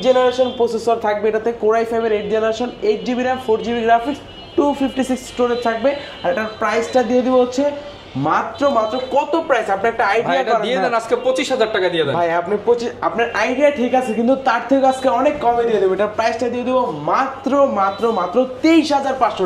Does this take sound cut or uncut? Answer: uncut